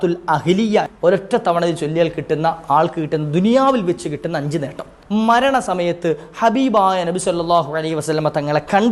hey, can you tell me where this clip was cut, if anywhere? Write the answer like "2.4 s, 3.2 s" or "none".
0.9 s, 4.9 s